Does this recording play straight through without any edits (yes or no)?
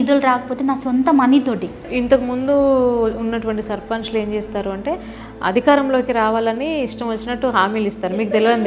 no